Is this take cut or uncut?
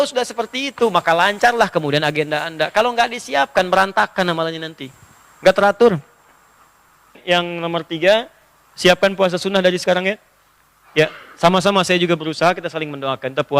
cut